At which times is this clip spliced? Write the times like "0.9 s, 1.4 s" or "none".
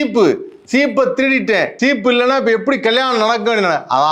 1.7 s